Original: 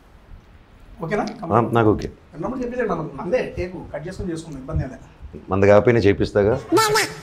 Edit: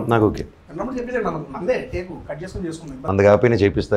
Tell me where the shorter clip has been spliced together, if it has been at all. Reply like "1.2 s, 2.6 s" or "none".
3.0 s